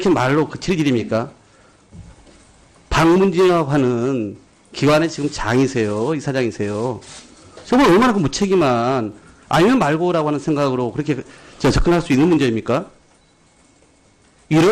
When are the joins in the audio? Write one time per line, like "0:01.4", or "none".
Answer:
0:03.5